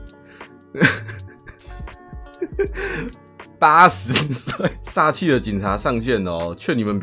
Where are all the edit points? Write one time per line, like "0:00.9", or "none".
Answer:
0:04.8